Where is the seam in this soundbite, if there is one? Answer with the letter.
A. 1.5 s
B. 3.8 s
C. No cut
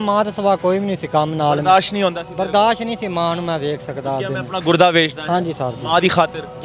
C